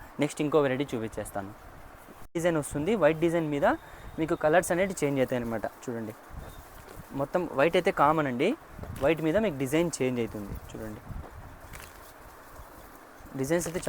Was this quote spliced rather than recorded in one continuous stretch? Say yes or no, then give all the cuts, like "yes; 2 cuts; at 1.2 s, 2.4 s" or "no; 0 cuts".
yes; 1 cut; at 2.3 s